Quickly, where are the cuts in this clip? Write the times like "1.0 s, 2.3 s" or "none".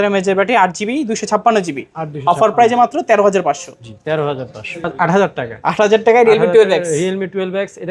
4.9 s